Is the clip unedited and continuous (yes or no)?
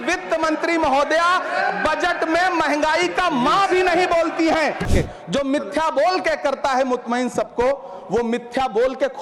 no